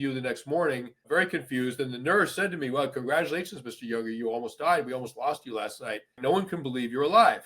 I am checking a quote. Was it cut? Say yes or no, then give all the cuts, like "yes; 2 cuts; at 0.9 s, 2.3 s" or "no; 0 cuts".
yes; 2 cuts; at 1.1 s, 6.2 s